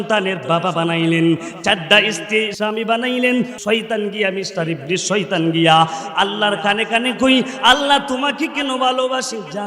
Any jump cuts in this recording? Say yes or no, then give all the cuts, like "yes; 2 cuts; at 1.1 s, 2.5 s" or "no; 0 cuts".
yes; 2 cuts; at 2.5 s, 3.6 s